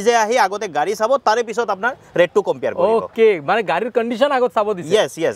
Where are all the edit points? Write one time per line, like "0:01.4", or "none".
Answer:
none

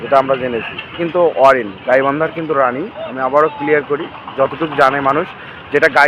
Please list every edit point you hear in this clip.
0:01.0

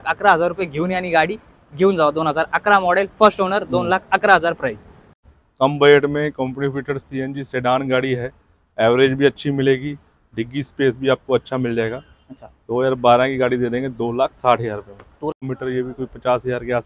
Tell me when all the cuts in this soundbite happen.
0:05.3
0:15.4

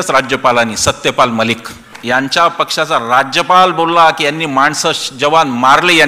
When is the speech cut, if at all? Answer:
0:01.9

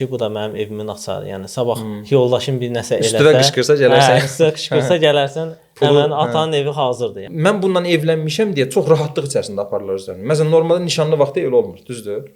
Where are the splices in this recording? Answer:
0:07.2

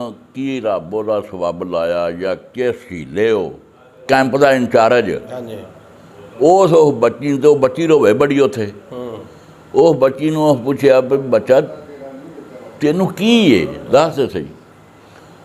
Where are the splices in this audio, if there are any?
0:04.0

